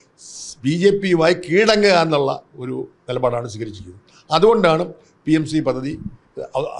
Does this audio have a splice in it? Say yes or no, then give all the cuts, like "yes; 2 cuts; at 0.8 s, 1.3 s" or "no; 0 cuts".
no; 0 cuts